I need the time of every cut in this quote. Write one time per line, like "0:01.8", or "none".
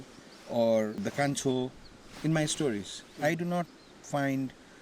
0:01.0